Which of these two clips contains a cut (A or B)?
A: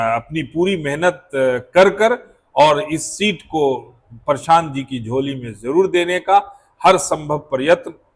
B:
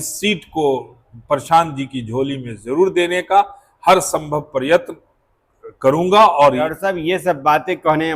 B